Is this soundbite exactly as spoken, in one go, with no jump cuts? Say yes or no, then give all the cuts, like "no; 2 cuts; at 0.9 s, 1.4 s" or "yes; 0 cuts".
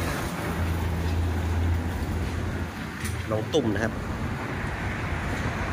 yes; 0 cuts